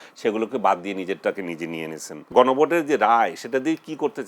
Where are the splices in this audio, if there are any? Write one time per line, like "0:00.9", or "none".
0:02.3